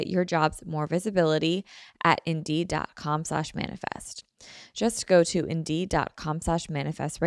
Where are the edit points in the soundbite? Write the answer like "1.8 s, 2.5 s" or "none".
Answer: none